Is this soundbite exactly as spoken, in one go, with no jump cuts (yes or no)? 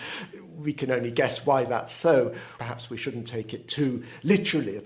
no